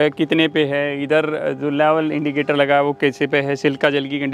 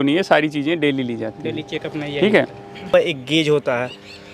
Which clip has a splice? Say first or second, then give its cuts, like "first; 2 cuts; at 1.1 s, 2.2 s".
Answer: second; 1 cut; at 2.9 s